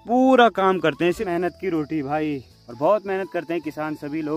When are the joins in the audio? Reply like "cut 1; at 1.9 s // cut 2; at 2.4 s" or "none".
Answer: cut 1; at 1.2 s

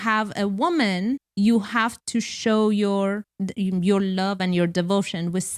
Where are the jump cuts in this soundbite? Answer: cut 1; at 1.3 s // cut 2; at 3.3 s

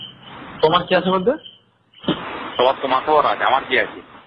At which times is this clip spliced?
cut 1; at 2.2 s

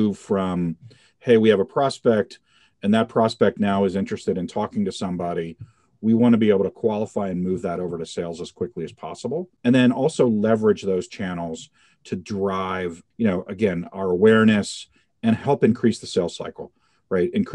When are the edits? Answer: none

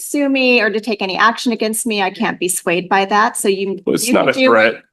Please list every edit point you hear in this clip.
none

